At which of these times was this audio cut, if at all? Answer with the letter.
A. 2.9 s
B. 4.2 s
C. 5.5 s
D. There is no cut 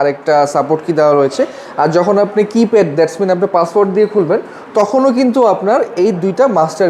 D